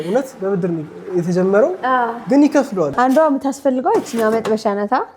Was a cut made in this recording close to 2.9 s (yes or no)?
yes